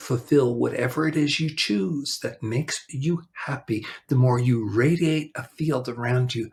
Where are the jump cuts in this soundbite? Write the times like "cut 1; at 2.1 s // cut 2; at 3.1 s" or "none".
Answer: none